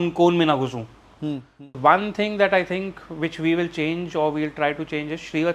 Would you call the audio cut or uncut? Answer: cut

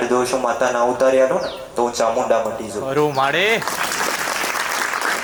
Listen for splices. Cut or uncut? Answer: uncut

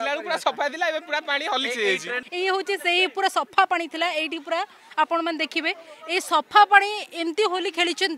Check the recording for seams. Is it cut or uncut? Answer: cut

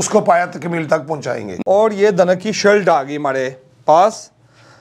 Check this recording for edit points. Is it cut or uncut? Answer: cut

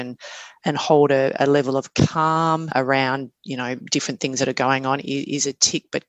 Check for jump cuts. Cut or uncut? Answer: cut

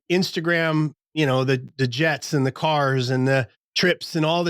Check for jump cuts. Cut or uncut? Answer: cut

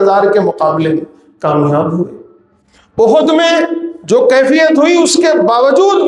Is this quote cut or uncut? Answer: uncut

